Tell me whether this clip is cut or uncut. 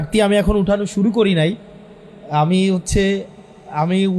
uncut